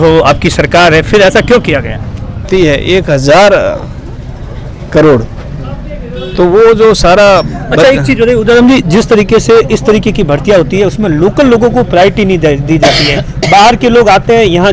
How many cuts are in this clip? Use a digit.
1